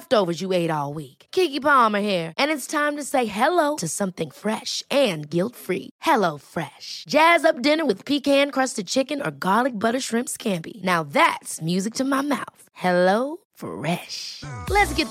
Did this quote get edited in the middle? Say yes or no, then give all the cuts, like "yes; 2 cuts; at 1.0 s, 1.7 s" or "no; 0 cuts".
no; 0 cuts